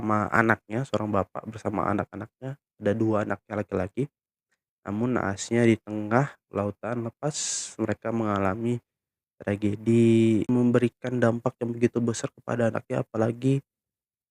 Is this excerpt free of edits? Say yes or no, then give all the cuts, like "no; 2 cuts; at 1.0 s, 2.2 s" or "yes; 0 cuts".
no; 1 cut; at 10.5 s